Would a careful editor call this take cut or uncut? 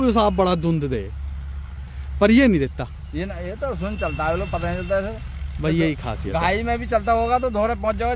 uncut